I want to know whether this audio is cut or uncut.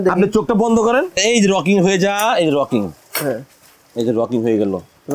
cut